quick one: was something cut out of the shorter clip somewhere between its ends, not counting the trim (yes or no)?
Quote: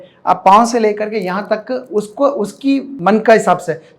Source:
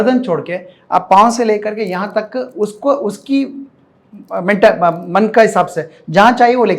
yes